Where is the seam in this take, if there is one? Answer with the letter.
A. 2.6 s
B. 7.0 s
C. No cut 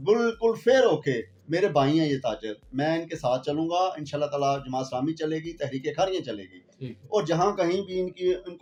C